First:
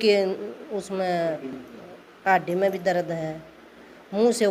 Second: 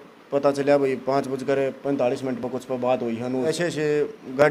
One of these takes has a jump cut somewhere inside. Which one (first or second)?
second